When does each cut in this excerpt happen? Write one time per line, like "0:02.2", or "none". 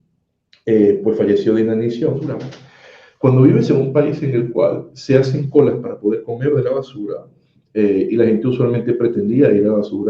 0:02.5